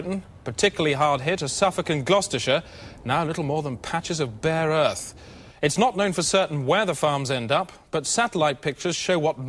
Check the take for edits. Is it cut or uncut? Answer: cut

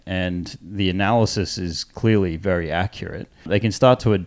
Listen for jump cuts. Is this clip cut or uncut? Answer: cut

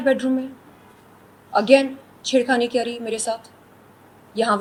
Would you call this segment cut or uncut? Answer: uncut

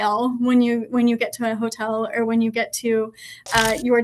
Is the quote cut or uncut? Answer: uncut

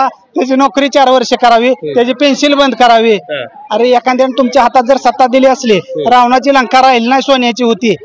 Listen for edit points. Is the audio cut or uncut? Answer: uncut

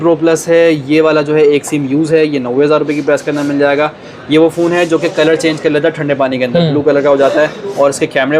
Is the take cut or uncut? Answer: uncut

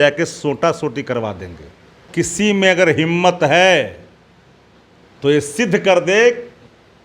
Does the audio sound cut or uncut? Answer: cut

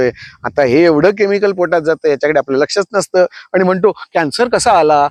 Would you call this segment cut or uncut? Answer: uncut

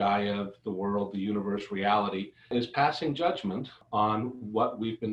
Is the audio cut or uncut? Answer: cut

